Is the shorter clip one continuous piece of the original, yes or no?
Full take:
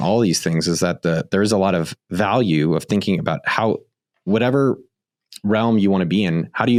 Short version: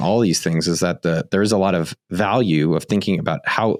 yes